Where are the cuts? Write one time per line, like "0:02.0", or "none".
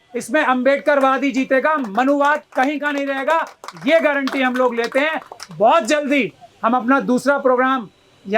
none